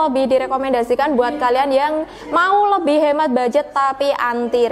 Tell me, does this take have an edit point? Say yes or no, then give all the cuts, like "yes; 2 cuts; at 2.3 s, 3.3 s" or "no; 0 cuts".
no; 0 cuts